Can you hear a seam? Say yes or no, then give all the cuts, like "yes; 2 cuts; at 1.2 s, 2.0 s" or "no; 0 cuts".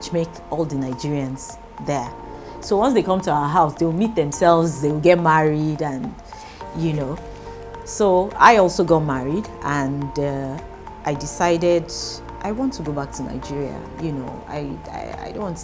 no; 0 cuts